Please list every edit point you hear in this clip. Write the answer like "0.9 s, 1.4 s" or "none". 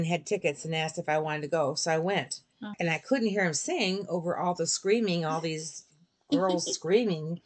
2.7 s